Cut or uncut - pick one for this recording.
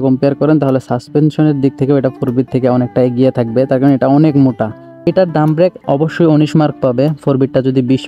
cut